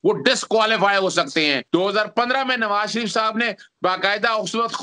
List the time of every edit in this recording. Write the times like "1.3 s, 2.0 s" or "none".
1.6 s